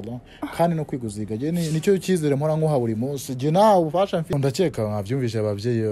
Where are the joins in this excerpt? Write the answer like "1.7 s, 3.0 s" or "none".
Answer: 4.3 s

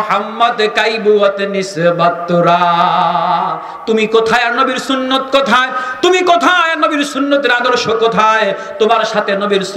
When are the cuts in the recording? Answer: none

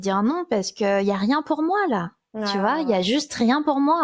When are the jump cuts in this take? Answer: none

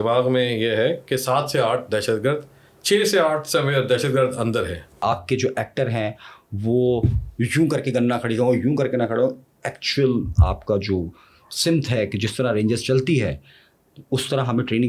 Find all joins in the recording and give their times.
5.2 s

